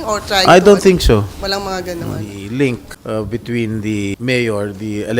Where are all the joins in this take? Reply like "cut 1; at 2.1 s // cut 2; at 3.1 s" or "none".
cut 1; at 2.3 s // cut 2; at 2.9 s // cut 3; at 4.1 s